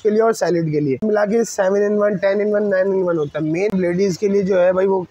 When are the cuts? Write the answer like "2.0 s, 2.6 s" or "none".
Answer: 1.0 s, 3.7 s